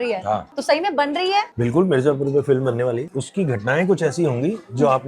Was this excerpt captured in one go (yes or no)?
no